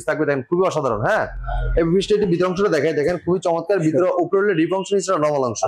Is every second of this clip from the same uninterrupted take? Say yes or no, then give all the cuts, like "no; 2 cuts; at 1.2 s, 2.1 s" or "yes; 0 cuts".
yes; 0 cuts